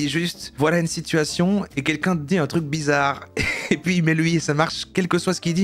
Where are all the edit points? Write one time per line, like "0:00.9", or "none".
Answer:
none